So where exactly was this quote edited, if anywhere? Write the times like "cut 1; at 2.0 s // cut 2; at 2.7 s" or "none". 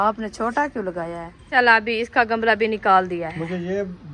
cut 1; at 1.4 s